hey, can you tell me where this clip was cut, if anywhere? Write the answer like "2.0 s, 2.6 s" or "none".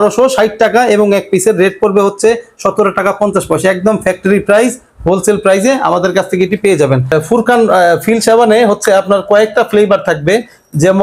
none